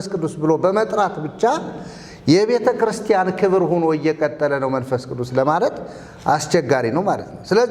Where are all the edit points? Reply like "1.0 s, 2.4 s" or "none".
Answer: none

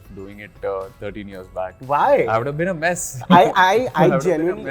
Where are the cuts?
none

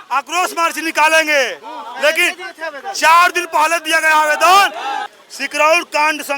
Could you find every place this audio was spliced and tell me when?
5.1 s

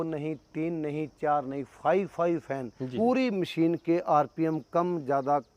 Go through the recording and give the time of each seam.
2.8 s

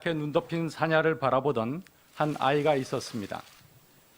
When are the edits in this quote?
2.0 s

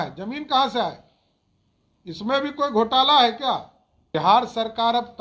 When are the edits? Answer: 4.1 s

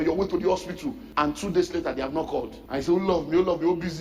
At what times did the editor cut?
1.2 s, 2.6 s

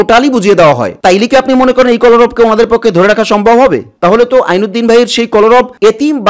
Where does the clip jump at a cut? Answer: 0.9 s, 3.9 s

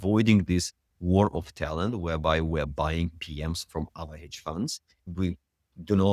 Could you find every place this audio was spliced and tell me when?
5.0 s

